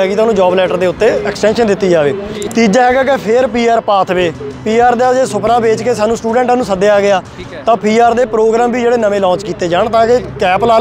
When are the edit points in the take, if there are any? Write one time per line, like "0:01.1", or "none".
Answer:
0:02.4